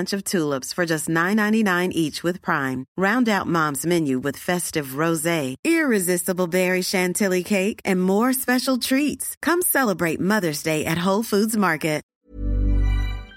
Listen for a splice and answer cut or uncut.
cut